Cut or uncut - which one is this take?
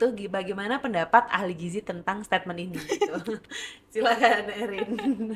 uncut